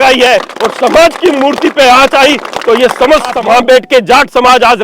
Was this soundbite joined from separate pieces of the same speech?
yes; 1 cut; at 3.4 s

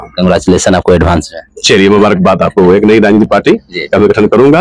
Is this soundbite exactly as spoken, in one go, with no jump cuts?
yes; 0 cuts

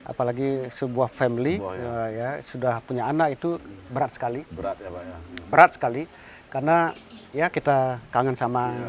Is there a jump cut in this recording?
no; 0 cuts

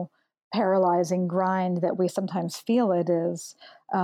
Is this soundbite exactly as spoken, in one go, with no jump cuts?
yes; 0 cuts

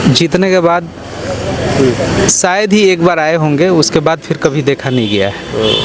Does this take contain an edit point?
no; 0 cuts

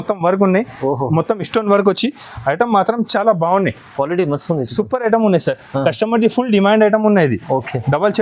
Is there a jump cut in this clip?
no; 0 cuts

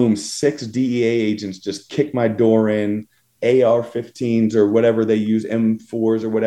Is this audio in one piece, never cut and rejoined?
yes; 0 cuts

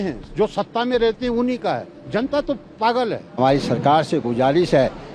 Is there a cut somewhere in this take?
yes; 1 cut; at 3.4 s

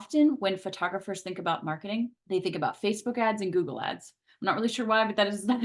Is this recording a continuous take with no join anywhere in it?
no; 1 cut; at 2.2 s

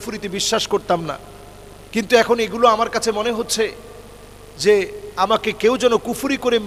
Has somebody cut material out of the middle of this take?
no; 0 cuts

